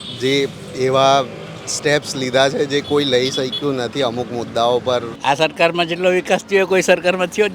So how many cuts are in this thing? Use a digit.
1